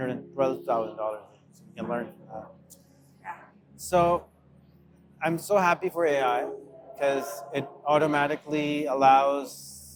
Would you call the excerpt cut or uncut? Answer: uncut